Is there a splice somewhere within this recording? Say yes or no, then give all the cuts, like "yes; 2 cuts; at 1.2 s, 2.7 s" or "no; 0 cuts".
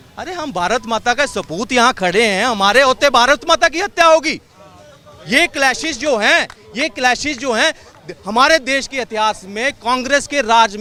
no; 0 cuts